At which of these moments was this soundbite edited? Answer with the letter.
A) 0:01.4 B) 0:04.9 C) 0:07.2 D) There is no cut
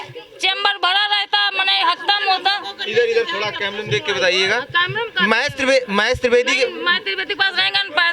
D